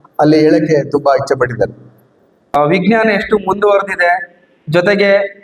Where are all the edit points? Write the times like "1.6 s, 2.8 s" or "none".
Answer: 2.5 s